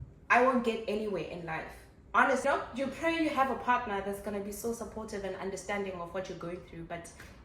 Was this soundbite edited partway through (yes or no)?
yes